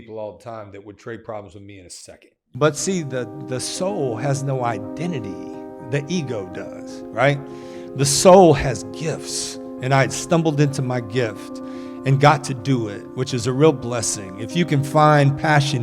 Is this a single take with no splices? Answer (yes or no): no